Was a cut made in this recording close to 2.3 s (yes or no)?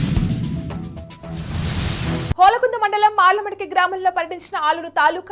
yes